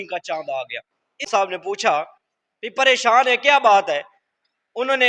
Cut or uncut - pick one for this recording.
cut